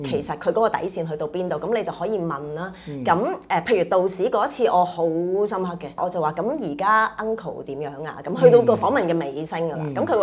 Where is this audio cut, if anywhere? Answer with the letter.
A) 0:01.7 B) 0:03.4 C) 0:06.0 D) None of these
C